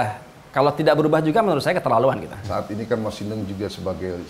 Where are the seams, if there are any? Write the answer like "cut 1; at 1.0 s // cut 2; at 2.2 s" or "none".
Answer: cut 1; at 2.5 s